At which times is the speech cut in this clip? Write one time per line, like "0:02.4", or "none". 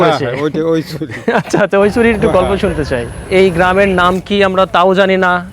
0:03.1